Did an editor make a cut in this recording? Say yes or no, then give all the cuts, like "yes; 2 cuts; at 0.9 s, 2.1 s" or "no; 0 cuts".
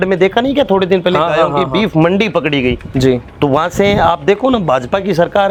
no; 0 cuts